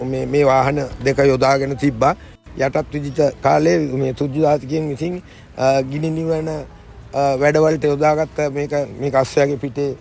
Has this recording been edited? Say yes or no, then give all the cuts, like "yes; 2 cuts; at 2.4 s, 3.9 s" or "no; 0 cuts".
yes; 2 cuts; at 2.4 s, 8.9 s